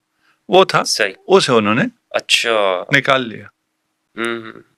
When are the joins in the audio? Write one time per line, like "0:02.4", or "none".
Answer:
none